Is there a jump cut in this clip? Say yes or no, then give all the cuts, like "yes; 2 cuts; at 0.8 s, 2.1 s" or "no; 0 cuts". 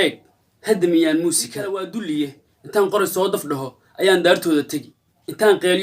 yes; 1 cut; at 1.9 s